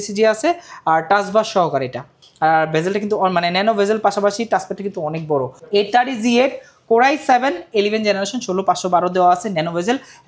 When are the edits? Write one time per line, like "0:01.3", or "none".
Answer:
0:05.6